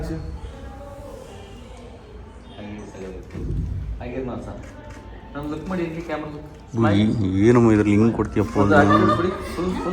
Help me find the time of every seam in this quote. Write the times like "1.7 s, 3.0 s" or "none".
none